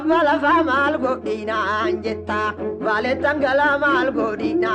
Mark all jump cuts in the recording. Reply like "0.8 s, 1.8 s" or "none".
none